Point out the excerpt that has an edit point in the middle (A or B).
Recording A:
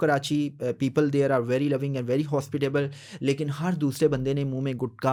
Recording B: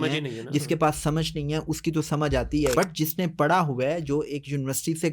B